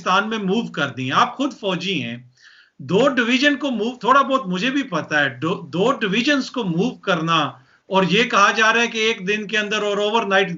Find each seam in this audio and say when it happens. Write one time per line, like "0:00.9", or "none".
none